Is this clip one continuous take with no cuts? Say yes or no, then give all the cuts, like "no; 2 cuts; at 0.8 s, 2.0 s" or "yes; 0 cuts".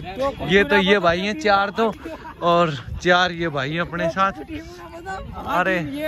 yes; 0 cuts